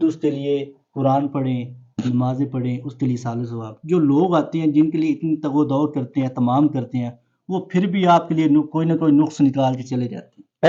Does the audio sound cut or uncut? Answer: uncut